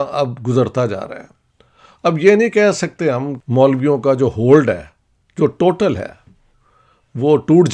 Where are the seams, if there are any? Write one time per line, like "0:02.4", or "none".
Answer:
0:03.3